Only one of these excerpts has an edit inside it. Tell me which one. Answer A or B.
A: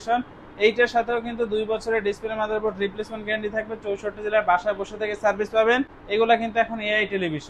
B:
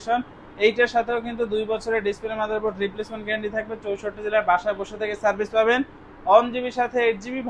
A